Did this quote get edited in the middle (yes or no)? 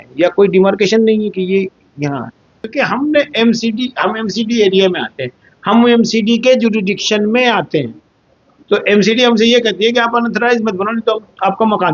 yes